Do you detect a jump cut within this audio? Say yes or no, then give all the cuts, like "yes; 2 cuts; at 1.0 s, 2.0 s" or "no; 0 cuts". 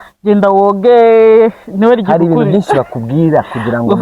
no; 0 cuts